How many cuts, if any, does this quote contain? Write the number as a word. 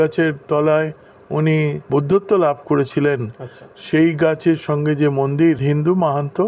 two